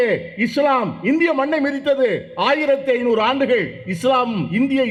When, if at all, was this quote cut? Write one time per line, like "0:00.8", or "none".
none

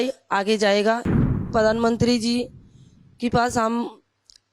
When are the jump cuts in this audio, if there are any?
0:01.5

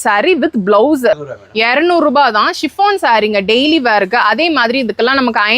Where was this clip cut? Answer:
0:01.3

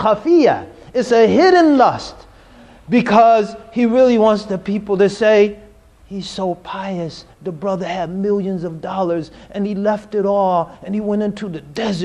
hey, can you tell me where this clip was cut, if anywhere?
0:05.3

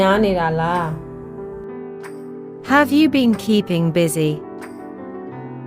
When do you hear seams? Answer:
0:01.0
0:02.7

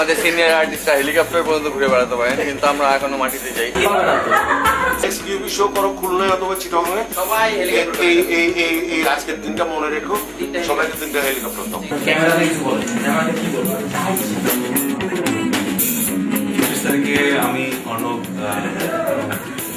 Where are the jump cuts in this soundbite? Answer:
none

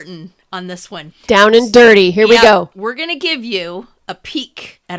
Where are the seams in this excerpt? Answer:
0:01.1
0:02.7

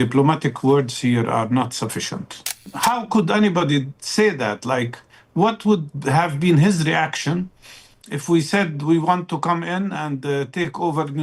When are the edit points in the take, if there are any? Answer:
0:02.7

